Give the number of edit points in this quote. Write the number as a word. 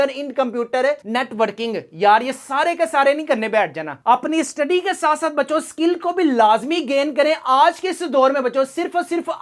one